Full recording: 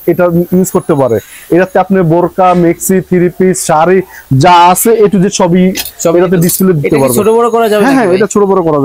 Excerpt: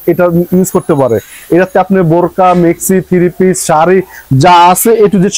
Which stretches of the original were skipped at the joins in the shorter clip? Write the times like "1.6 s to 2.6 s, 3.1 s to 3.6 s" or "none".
none